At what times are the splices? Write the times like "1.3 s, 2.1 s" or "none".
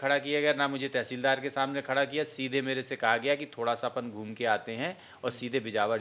none